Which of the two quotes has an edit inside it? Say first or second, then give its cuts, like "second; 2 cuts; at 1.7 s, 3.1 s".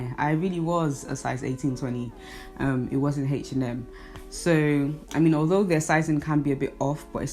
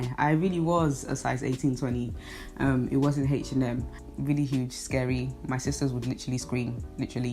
second; 1 cut; at 4.1 s